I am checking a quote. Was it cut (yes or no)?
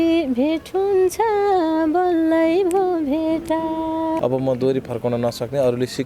yes